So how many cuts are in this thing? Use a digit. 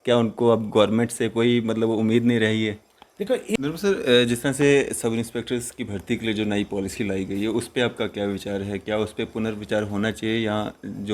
1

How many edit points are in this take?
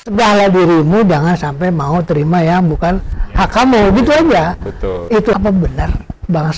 1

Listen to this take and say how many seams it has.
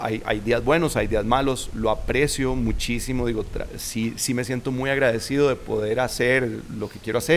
0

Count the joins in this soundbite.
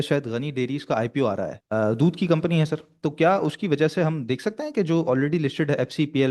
1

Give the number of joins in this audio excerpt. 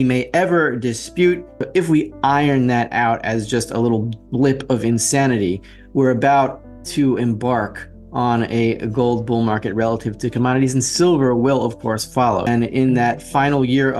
1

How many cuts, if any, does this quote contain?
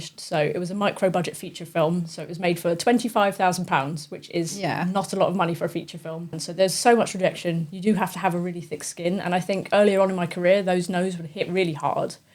1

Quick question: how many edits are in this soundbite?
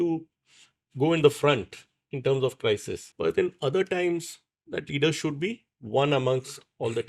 1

